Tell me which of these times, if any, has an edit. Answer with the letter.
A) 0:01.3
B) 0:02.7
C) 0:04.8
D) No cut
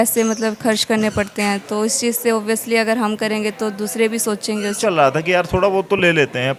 C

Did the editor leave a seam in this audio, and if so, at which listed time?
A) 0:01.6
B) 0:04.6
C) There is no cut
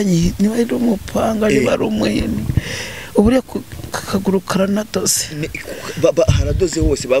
C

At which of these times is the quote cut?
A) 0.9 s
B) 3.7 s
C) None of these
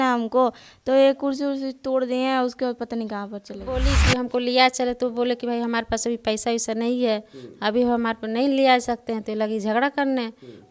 B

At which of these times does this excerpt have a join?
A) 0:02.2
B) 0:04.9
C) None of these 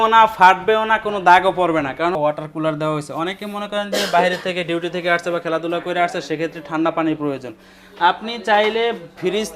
A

